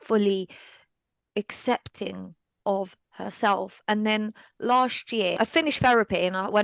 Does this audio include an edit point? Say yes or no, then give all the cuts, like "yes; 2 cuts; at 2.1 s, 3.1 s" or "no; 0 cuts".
yes; 1 cut; at 5.3 s